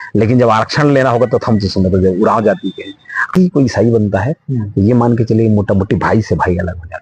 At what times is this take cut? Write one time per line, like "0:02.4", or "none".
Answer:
0:03.3